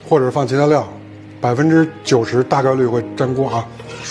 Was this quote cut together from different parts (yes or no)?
no